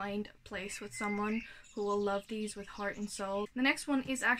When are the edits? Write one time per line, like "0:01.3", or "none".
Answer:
0:03.5